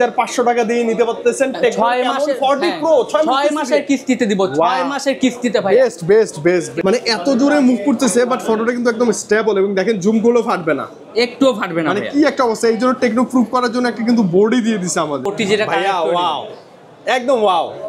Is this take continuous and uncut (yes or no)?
no